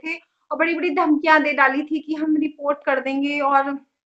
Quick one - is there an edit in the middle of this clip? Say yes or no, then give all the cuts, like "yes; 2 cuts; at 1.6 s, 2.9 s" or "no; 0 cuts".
no; 0 cuts